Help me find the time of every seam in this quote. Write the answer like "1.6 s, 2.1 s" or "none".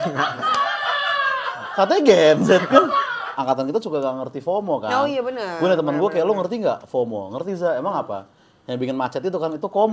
3.3 s